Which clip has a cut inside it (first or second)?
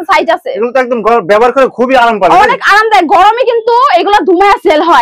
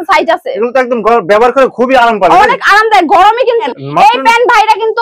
second